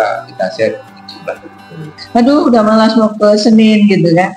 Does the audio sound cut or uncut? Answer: cut